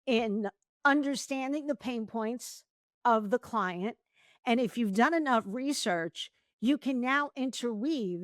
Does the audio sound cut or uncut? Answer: uncut